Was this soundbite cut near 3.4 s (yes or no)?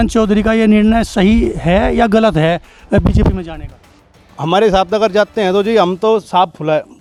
no